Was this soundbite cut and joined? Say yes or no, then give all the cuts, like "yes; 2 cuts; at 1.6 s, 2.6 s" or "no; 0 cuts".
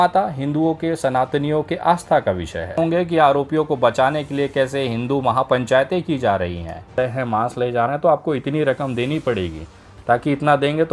yes; 2 cuts; at 2.8 s, 7.0 s